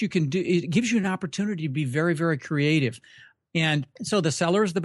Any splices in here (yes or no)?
yes